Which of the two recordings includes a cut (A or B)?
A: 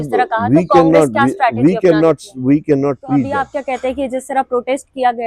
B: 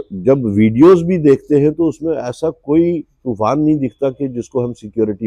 A